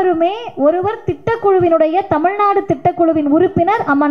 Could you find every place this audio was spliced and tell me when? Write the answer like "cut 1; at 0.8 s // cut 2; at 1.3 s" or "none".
none